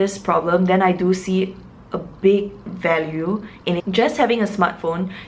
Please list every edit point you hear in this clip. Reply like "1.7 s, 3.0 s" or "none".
3.8 s